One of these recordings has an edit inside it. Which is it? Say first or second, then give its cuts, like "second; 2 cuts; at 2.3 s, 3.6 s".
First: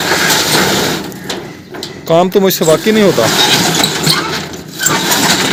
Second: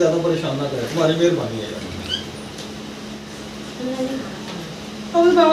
second; 1 cut; at 3.2 s